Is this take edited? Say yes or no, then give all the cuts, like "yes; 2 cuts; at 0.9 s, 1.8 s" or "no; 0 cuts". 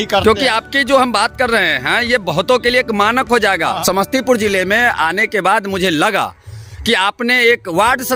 no; 0 cuts